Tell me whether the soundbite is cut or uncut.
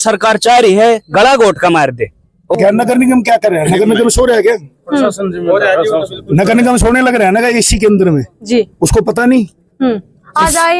cut